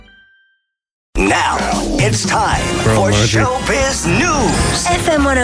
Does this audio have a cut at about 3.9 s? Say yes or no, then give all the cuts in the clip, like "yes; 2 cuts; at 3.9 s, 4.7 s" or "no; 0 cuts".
no; 1 cut; at 1.2 s